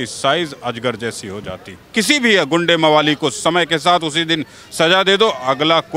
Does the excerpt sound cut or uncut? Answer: cut